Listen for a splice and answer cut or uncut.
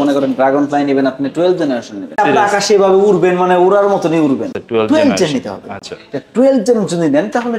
cut